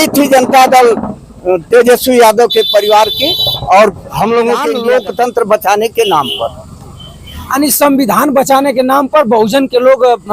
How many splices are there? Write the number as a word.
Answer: one